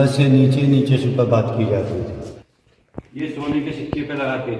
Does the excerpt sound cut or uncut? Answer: cut